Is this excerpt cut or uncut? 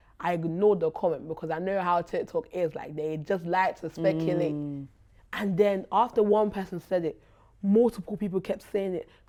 uncut